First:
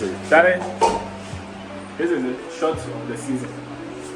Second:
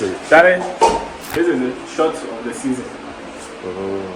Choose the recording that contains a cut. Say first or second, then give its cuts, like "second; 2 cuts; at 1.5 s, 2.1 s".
second; 1 cut; at 1.2 s